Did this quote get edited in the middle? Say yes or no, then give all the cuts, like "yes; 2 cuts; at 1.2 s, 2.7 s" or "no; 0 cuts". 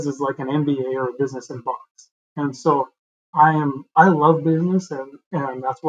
no; 0 cuts